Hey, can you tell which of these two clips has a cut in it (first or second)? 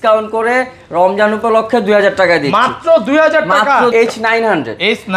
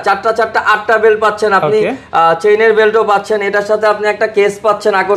first